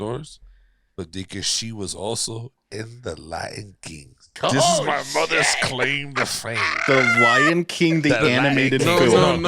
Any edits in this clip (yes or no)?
yes